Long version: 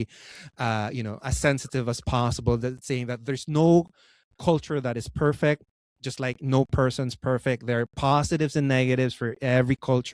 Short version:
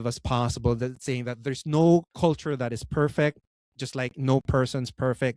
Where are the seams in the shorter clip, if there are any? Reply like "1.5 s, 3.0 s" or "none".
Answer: 2.1 s